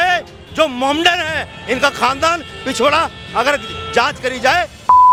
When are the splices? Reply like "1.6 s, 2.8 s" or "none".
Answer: none